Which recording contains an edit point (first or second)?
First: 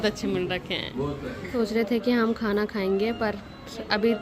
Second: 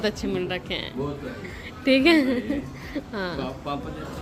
first